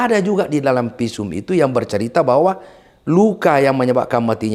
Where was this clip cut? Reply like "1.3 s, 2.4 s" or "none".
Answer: none